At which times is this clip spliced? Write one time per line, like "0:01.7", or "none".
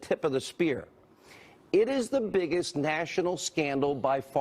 0:00.9